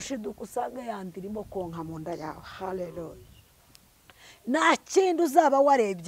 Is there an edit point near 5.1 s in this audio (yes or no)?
no